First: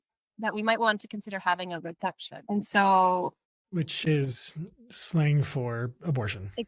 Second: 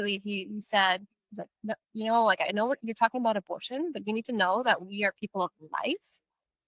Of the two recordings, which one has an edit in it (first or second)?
first